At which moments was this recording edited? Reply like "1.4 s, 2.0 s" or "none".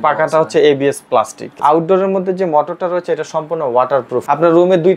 1.4 s, 4.2 s